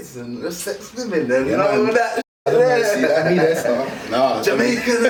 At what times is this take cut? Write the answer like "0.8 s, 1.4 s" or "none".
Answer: none